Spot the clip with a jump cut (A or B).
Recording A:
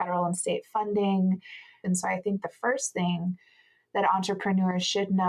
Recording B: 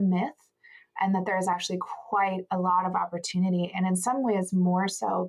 A